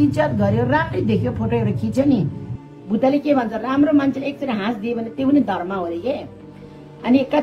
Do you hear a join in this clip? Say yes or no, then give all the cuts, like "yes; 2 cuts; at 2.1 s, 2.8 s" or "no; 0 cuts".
no; 0 cuts